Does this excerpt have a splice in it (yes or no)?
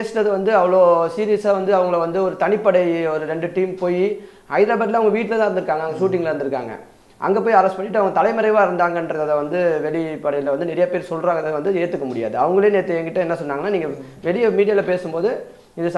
no